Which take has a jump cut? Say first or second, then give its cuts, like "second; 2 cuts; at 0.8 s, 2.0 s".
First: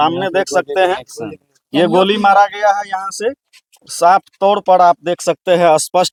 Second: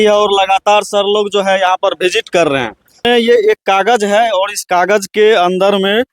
second; 1 cut; at 3.0 s